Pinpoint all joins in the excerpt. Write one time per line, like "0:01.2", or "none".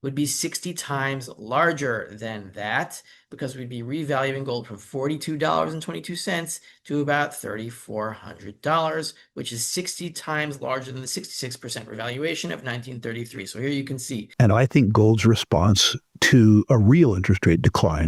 0:14.2